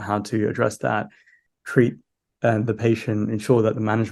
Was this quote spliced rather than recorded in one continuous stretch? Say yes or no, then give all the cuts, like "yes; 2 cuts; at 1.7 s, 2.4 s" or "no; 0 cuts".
no; 0 cuts